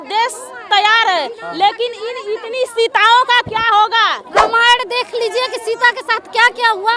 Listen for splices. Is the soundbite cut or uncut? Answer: cut